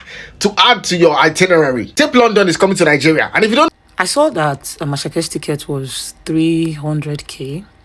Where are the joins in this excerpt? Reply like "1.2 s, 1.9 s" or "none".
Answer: 3.7 s